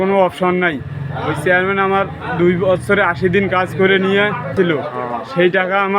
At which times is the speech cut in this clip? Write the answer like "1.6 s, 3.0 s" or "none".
4.5 s